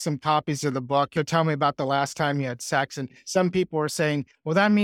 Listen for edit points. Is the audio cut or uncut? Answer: cut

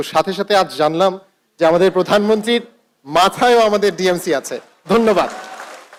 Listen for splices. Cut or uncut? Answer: uncut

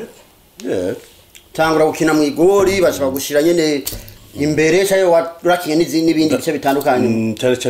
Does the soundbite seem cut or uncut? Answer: uncut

